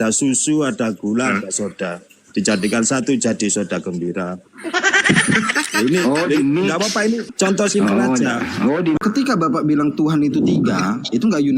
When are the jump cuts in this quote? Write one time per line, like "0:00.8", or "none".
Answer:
0:09.0